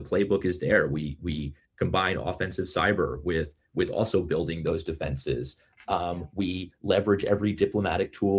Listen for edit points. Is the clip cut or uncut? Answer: uncut